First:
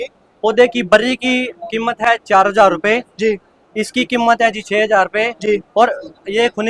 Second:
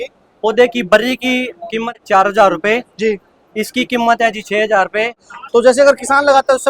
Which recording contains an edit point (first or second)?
second